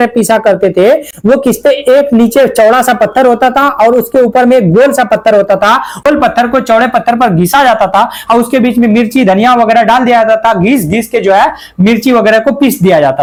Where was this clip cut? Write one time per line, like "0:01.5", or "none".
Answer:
none